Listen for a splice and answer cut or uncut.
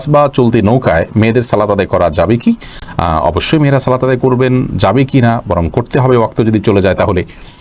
uncut